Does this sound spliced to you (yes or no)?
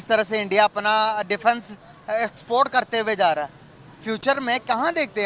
no